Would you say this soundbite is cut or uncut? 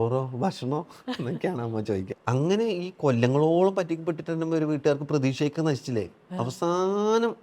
cut